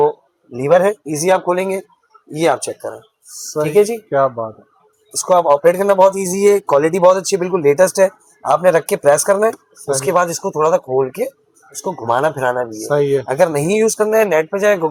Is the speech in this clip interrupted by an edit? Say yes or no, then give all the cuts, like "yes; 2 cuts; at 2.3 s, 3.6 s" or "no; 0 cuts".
no; 0 cuts